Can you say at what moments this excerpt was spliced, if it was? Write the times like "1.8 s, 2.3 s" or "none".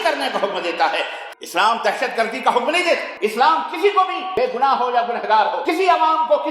1.2 s, 3.1 s, 4.2 s, 5.6 s